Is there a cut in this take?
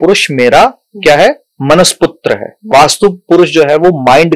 yes; 1 cut; at 2.6 s

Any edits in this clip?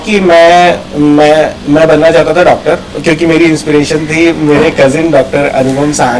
no; 0 cuts

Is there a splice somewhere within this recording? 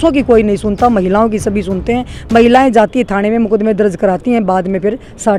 no; 0 cuts

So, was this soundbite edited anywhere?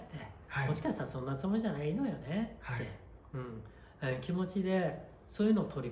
no; 0 cuts

